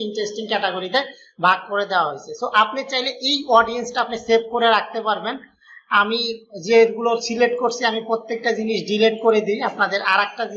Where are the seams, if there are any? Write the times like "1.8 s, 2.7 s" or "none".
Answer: none

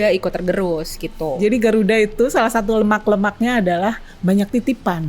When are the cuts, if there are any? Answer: 1.2 s

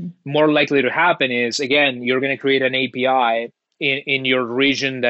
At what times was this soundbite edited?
none

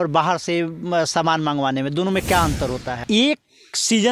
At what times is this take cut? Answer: 3.0 s

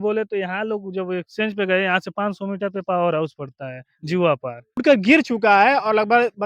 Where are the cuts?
4.8 s

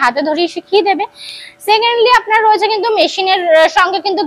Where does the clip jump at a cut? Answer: none

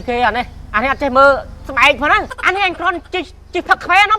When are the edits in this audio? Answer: 2.4 s

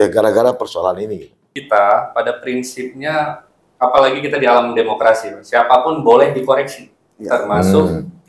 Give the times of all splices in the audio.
1.5 s

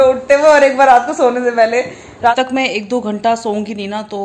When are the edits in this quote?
2.3 s

